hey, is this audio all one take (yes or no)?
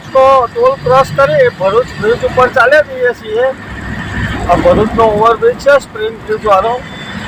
yes